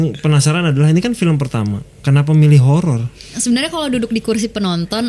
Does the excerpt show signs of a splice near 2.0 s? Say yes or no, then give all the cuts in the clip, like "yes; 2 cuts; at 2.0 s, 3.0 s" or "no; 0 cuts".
no; 1 cut; at 3.4 s